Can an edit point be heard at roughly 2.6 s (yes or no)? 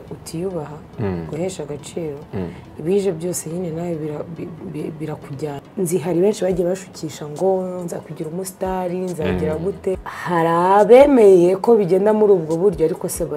no